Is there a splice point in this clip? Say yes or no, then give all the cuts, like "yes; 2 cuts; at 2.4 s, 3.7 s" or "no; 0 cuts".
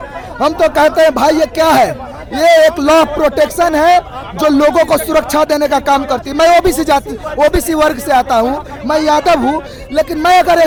no; 0 cuts